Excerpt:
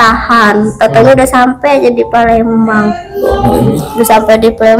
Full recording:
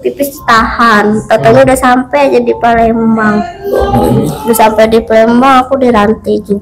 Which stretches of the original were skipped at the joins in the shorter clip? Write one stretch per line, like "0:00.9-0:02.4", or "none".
none